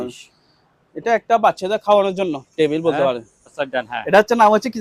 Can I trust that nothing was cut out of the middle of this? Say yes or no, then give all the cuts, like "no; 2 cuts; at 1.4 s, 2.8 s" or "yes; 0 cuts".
no; 1 cut; at 3.6 s